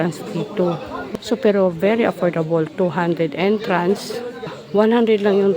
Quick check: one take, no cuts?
no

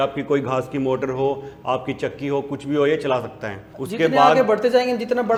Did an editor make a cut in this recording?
no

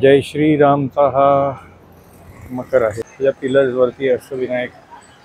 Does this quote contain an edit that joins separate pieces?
yes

